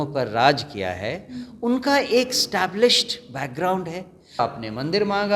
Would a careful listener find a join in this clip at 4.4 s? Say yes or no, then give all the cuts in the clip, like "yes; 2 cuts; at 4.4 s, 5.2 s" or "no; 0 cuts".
yes; 1 cut; at 4.4 s